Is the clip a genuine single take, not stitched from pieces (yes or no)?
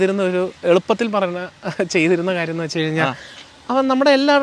yes